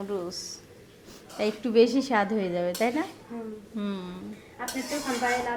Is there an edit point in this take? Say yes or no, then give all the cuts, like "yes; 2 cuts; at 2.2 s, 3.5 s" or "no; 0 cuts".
no; 0 cuts